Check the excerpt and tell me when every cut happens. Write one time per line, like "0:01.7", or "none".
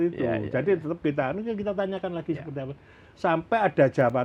none